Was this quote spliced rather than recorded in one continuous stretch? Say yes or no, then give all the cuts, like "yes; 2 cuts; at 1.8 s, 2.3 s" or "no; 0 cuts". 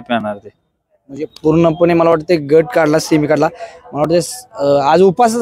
no; 0 cuts